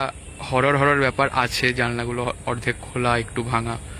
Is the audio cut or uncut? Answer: uncut